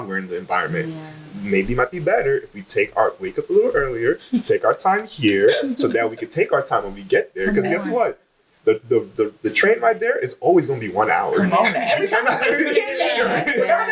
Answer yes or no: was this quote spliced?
no